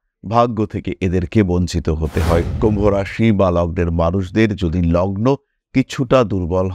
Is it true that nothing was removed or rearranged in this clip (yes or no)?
no